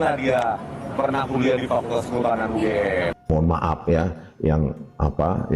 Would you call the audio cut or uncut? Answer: cut